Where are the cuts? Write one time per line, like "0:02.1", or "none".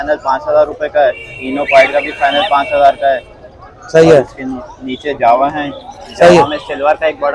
none